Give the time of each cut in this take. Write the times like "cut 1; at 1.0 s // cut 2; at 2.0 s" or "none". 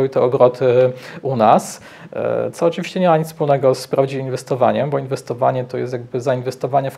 none